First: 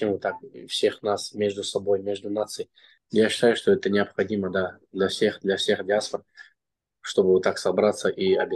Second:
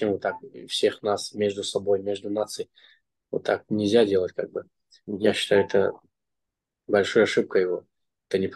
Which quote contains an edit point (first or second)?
first